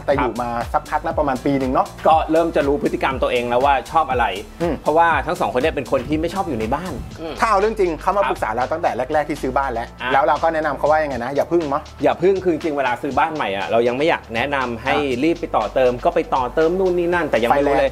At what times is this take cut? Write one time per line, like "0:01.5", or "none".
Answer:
none